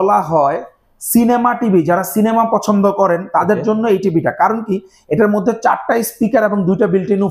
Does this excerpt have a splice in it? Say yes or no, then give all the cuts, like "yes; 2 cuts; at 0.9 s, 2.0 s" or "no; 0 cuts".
no; 0 cuts